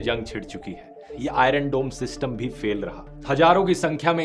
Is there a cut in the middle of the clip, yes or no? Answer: yes